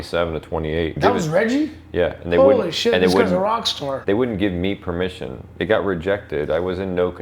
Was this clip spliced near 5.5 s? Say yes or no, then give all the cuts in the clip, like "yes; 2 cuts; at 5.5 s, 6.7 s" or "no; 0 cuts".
no; 2 cuts; at 1.0 s, 4.0 s